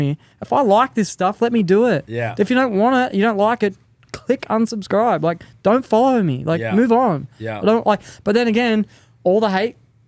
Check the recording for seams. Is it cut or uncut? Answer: uncut